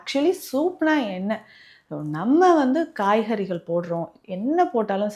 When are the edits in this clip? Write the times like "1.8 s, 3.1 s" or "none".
none

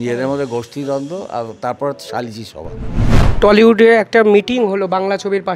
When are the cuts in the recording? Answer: 3.1 s

